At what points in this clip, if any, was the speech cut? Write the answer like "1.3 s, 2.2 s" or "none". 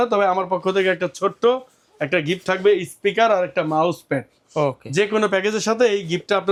none